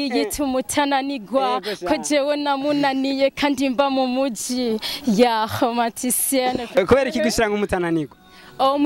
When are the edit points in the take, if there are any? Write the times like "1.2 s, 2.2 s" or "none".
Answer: 6.7 s